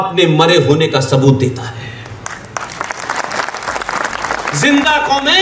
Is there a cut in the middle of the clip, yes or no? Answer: no